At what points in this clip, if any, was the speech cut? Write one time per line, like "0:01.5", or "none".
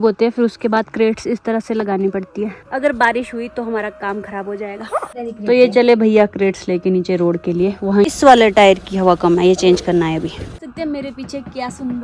0:02.6
0:05.1
0:08.1
0:10.6